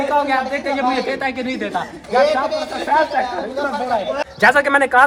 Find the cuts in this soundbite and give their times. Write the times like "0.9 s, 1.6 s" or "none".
none